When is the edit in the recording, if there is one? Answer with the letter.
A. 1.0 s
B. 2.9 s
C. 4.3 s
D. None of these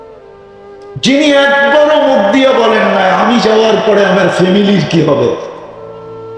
A